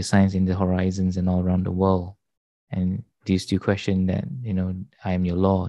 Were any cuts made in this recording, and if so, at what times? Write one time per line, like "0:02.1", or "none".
none